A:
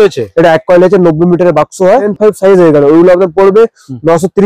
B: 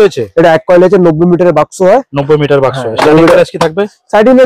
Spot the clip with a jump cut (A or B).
A